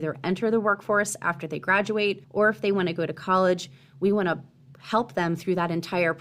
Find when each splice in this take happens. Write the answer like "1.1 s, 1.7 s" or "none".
2.2 s